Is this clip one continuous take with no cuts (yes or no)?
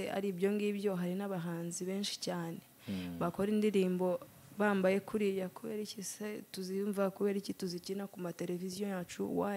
yes